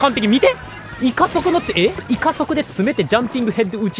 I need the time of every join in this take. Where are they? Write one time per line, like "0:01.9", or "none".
0:02.0